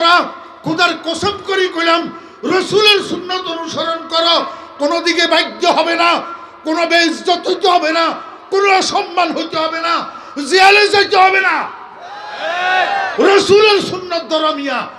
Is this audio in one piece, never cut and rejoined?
yes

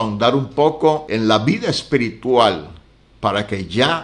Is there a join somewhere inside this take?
yes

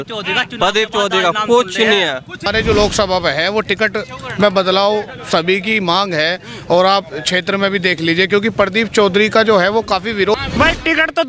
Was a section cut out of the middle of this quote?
yes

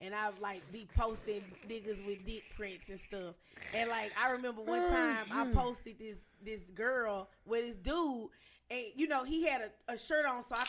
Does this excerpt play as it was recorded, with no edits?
yes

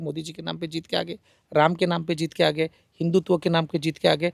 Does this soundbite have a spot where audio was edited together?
no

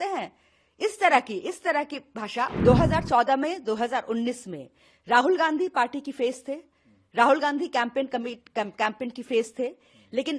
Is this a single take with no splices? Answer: no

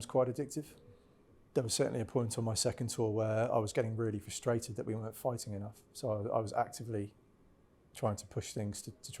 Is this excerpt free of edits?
no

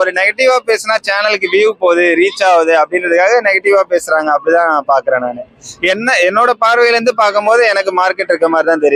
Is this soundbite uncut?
yes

